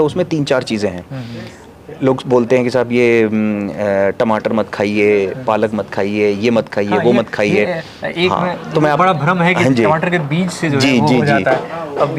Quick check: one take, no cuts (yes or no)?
yes